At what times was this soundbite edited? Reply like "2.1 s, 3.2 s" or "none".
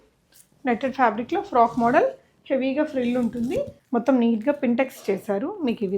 3.8 s